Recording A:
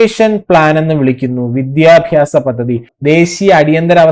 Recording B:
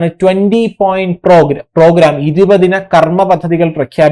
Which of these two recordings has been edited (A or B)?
A